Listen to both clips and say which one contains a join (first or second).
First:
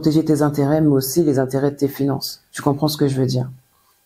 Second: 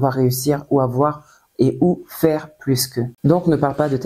second